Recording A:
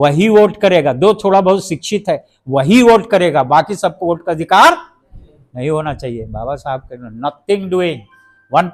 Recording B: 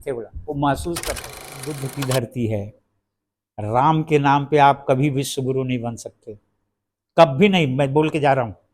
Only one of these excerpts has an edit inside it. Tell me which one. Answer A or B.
B